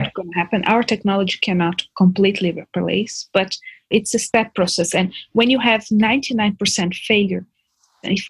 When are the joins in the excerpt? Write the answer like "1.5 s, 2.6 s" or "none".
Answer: 3.9 s